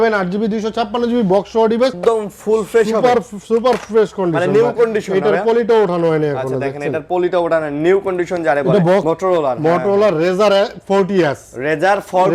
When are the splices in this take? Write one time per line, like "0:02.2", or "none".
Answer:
0:02.0
0:09.0